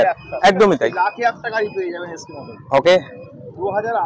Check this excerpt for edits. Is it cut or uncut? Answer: uncut